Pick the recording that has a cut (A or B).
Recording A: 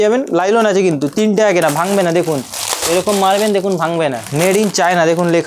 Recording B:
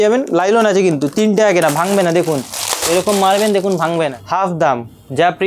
B